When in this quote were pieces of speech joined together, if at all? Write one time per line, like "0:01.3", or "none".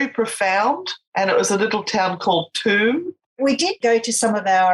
0:01.0
0:03.7